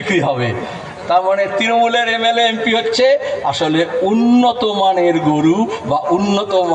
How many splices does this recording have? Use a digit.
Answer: 0